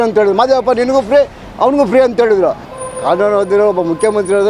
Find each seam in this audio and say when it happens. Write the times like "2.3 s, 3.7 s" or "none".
2.7 s